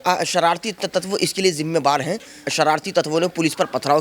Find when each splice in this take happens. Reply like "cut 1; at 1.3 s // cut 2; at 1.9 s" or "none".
cut 1; at 2.5 s